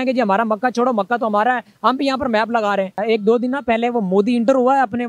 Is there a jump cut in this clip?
yes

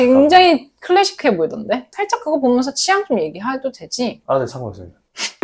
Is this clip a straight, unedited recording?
no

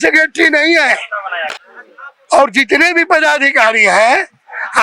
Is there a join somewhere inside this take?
yes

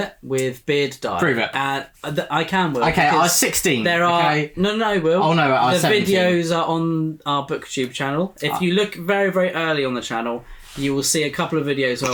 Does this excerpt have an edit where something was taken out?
no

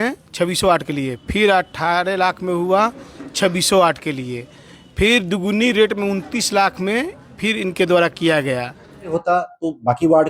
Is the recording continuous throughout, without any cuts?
no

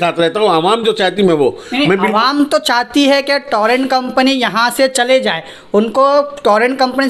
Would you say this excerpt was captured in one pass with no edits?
yes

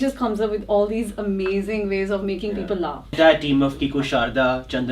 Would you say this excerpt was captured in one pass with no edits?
no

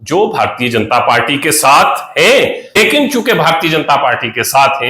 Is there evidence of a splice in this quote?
yes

